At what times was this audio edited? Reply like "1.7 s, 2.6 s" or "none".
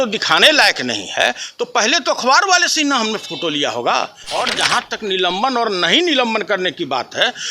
4.3 s